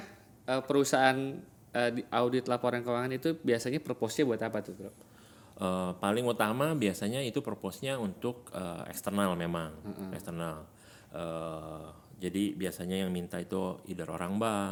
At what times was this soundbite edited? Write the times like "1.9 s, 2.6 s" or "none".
none